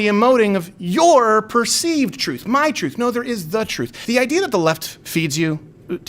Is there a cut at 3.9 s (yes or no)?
yes